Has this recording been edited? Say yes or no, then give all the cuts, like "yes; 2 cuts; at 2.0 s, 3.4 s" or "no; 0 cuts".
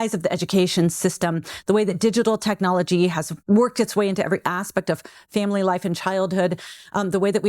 yes; 1 cut; at 3.3 s